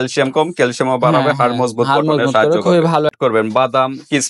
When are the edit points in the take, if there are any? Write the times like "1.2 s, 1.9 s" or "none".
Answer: 3.2 s